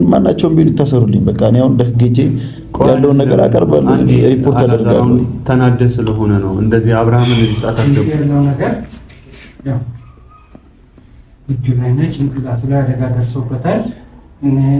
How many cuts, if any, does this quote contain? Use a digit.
1